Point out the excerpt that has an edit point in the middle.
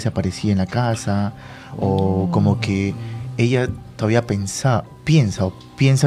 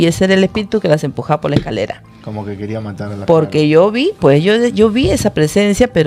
second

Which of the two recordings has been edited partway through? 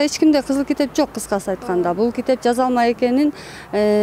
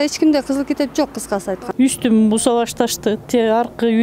second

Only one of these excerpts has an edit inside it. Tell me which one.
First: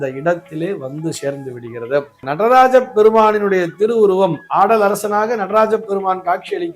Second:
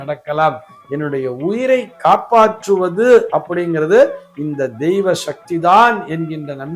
first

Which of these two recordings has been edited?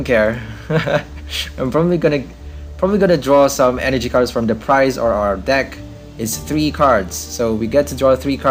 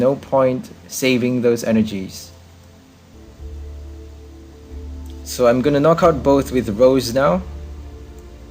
second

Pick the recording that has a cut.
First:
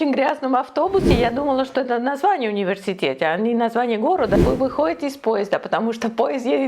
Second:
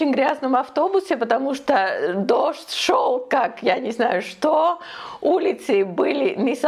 first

